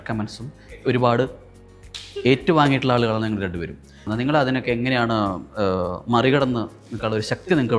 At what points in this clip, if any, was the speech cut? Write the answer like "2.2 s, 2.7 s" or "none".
none